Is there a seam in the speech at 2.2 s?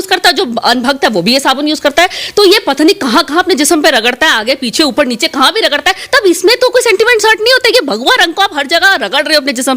no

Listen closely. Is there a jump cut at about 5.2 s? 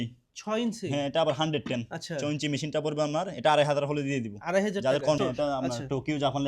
yes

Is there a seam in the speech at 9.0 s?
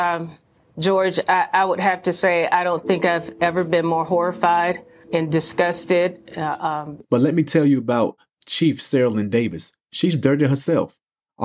no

